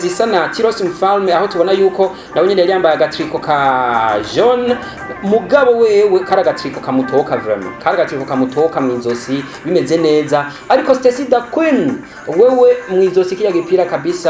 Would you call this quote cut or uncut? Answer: uncut